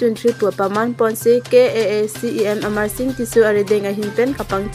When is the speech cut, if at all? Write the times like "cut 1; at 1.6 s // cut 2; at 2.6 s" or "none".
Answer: none